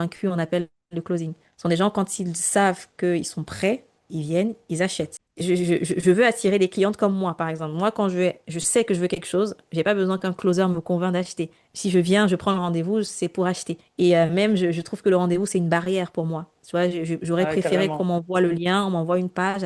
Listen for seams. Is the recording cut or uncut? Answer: uncut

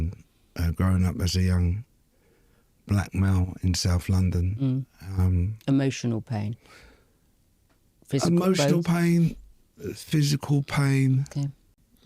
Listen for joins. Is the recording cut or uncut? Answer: uncut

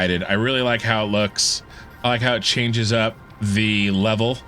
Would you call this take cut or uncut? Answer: cut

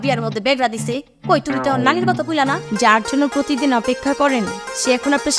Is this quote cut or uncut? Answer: cut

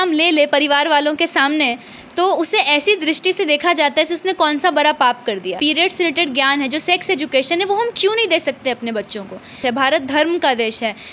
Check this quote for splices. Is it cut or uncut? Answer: cut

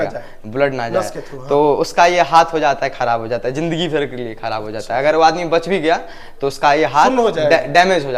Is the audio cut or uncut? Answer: uncut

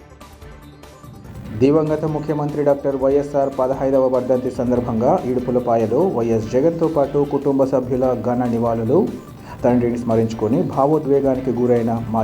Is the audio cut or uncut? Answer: cut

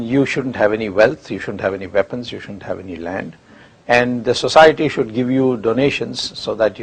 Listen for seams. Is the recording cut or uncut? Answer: cut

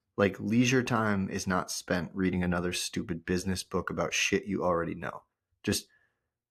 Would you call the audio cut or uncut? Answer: uncut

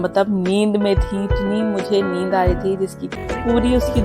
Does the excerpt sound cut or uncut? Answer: cut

